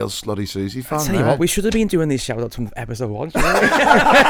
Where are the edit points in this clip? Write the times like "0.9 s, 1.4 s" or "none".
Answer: none